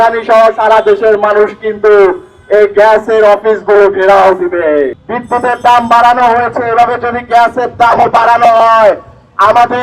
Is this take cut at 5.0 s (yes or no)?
yes